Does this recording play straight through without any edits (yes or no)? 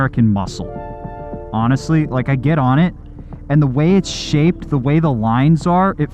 yes